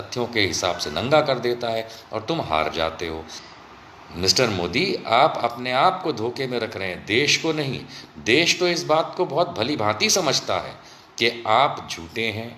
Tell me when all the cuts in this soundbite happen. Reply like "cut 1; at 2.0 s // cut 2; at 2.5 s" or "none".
cut 1; at 3.3 s